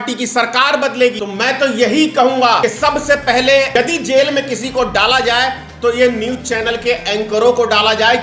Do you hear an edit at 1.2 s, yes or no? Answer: yes